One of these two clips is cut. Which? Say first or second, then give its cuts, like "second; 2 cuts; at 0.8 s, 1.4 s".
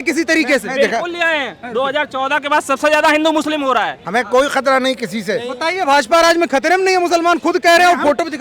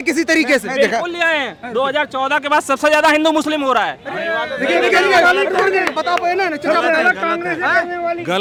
first; 1 cut; at 4.0 s